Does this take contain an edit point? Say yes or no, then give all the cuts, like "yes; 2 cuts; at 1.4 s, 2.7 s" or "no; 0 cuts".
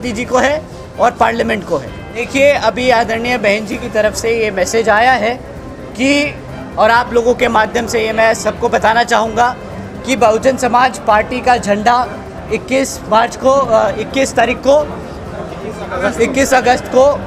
yes; 1 cut; at 2.3 s